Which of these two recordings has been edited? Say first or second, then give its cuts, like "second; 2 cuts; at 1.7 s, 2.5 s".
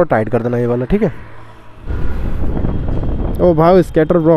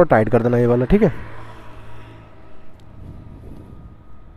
first; 1 cut; at 1.9 s